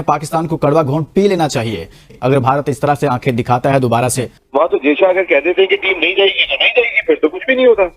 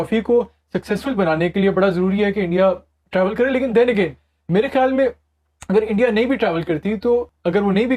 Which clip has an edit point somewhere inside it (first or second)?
first